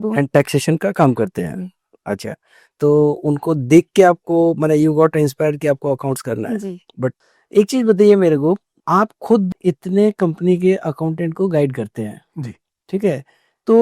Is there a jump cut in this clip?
yes; 1 cut; at 7.3 s

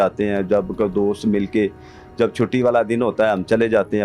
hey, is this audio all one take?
yes; 0 cuts

